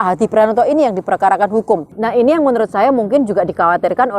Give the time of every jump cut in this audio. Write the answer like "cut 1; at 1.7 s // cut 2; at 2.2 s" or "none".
cut 1; at 2.0 s